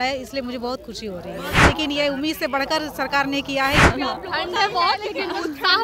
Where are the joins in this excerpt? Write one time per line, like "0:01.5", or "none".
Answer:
0:01.6
0:03.8